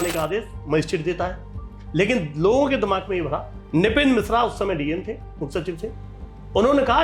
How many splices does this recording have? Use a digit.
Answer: 1